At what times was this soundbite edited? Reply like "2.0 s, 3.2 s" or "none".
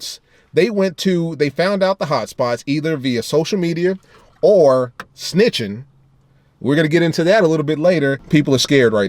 8.2 s